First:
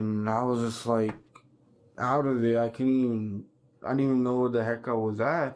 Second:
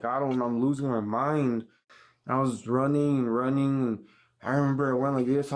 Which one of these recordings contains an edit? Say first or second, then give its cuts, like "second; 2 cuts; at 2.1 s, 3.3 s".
second; 1 cut; at 1.9 s